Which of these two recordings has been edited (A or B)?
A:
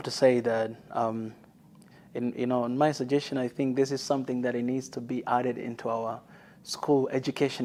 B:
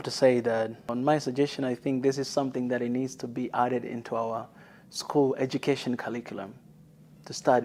B